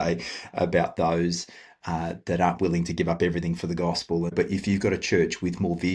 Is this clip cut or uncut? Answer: cut